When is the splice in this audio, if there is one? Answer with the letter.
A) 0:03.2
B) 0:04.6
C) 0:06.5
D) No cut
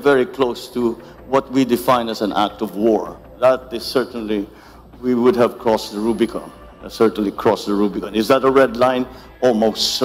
A